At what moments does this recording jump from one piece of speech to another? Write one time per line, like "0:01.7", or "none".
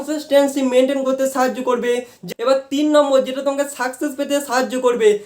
0:02.2